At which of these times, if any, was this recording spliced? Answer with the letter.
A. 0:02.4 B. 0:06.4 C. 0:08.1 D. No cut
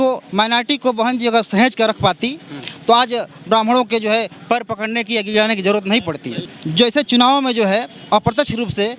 B